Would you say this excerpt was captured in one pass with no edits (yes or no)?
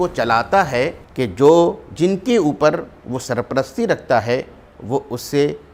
no